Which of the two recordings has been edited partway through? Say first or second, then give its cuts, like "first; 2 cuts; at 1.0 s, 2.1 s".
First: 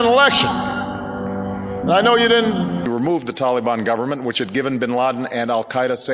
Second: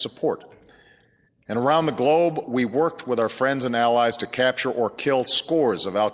first; 1 cut; at 2.9 s